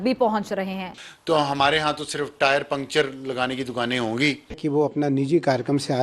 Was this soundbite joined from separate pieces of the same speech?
no; 0 cuts

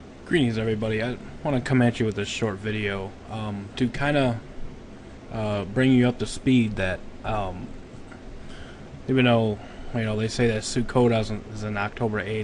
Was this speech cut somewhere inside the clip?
no; 0 cuts

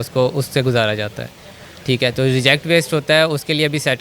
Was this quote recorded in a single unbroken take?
yes; 0 cuts

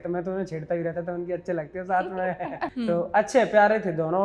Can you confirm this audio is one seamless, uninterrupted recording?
no; 1 cut; at 2.7 s

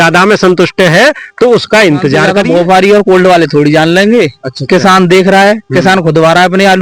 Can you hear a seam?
yes; 1 cut; at 2.3 s

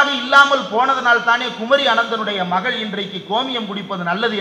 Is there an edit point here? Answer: no; 0 cuts

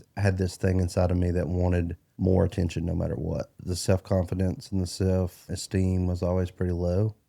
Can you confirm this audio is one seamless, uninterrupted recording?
no; 3 cuts; at 2.0 s, 3.6 s, 5.4 s

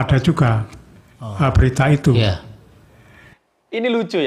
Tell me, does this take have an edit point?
no; 0 cuts

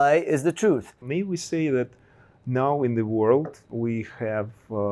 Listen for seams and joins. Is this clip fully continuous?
no; 2 cuts; at 1.0 s, 3.7 s

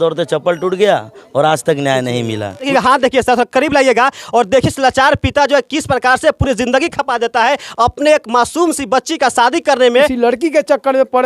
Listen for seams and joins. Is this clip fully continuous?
no; 2 cuts; at 2.7 s, 10.1 s

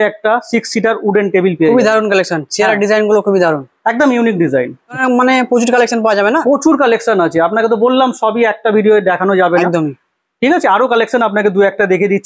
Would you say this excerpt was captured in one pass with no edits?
yes; 0 cuts

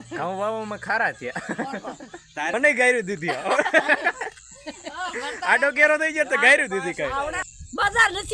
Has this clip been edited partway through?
yes; 2 cuts; at 2.5 s, 7.4 s

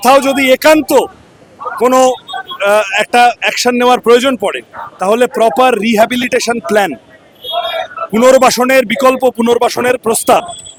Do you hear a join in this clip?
no; 0 cuts

